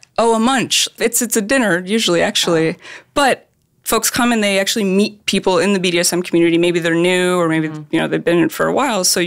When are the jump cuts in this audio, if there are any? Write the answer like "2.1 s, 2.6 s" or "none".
1.0 s

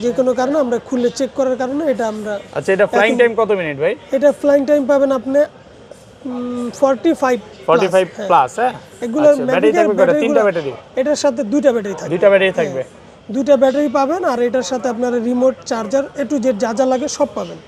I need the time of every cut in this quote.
none

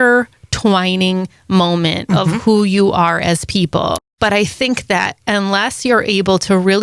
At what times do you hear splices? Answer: 3.9 s

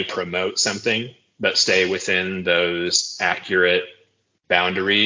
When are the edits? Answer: none

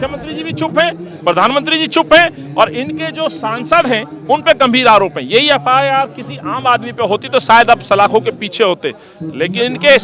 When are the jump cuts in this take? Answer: none

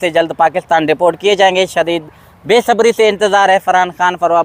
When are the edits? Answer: none

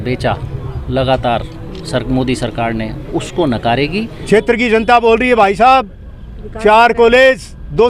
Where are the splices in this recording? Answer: 4.2 s

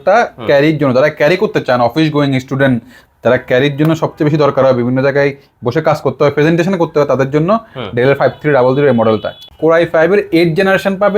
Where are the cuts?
9.4 s

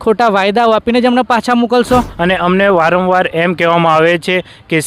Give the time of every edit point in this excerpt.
2.1 s

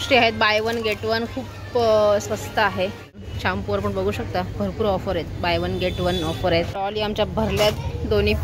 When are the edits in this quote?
3.3 s, 6.7 s

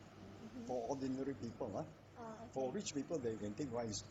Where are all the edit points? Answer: 3.2 s

